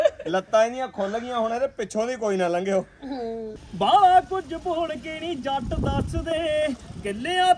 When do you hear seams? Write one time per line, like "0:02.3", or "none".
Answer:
0:03.4